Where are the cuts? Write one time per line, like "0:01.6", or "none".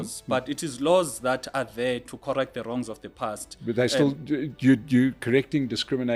none